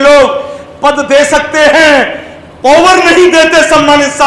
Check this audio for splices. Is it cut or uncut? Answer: uncut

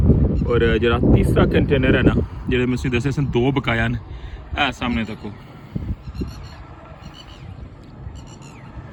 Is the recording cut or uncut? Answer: uncut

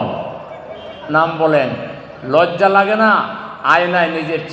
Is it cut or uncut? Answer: uncut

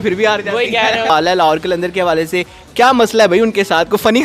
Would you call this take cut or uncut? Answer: cut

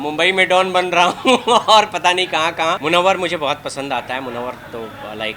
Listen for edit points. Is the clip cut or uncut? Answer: cut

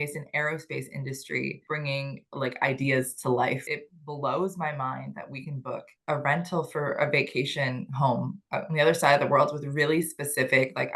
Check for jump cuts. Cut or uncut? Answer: cut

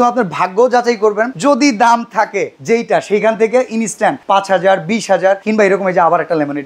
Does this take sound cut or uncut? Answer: cut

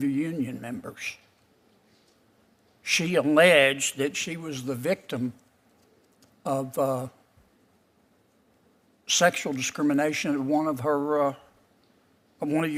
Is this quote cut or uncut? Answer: uncut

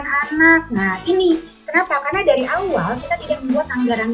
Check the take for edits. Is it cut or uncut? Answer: uncut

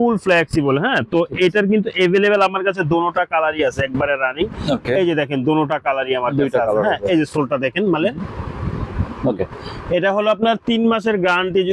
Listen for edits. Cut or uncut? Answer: uncut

